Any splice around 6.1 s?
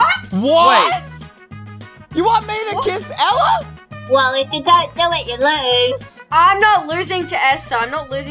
yes; 1 cut; at 6.1 s

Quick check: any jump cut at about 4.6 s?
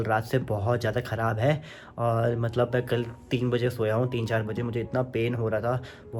no; 0 cuts

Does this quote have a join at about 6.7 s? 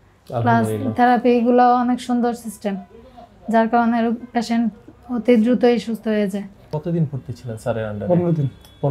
yes; 1 cut; at 6.7 s

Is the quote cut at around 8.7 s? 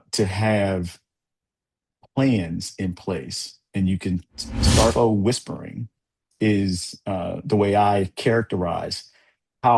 no; 1 cut; at 4.9 s

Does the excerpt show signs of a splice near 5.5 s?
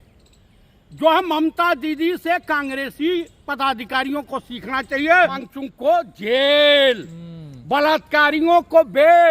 yes; 1 cut; at 5.5 s

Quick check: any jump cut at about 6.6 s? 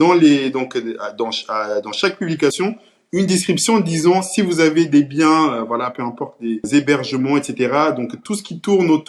yes; 1 cut; at 6.6 s

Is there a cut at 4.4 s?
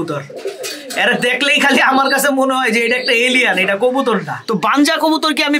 yes; 1 cut; at 4.4 s

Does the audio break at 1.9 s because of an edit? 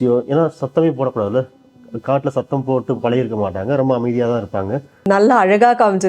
no; 1 cut; at 5.1 s

